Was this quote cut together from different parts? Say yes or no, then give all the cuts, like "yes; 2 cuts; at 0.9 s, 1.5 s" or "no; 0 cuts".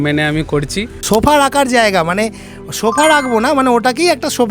yes; 1 cut; at 1.0 s